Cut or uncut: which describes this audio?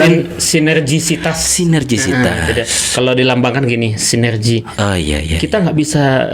uncut